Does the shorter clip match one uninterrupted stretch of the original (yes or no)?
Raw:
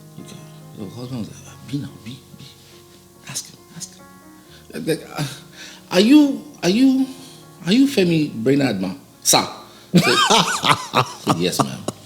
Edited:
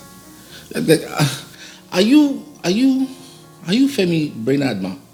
yes